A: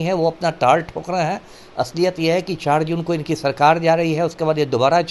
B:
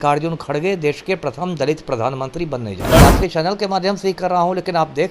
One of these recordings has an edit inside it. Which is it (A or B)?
B